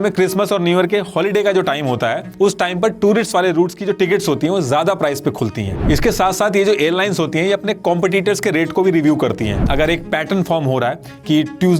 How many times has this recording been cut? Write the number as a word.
two